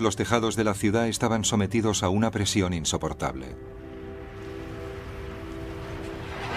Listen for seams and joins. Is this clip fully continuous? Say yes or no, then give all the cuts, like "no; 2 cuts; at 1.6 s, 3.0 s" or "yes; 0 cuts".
yes; 0 cuts